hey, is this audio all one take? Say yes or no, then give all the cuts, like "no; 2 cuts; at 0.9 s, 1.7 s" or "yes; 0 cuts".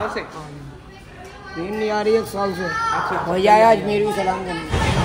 yes; 0 cuts